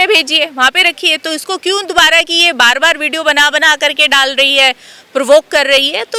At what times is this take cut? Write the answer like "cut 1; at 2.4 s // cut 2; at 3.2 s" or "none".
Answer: none